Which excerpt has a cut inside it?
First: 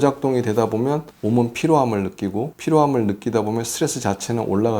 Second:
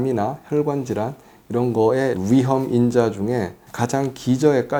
first; 2 cuts; at 1.1 s, 2.5 s

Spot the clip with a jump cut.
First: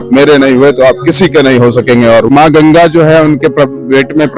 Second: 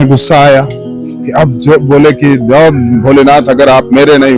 first; 1 cut; at 2.3 s

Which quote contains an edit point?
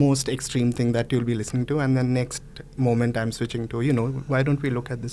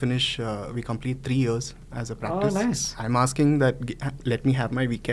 second; 1 cut; at 2.9 s

